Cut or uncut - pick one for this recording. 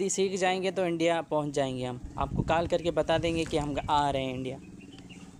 uncut